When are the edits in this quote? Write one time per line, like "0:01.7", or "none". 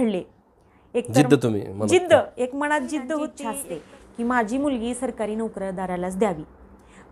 0:03.5